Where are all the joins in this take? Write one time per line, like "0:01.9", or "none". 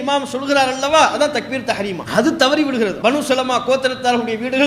0:02.0
0:03.0